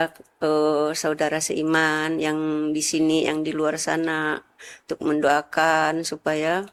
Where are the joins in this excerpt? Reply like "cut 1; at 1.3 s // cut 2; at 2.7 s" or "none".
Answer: none